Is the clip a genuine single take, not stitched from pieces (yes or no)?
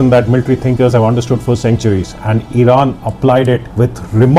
yes